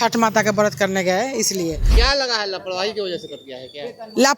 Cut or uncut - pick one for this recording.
cut